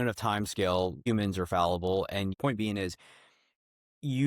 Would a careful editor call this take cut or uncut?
cut